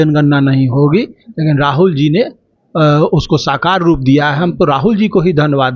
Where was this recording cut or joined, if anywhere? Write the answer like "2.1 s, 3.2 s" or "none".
none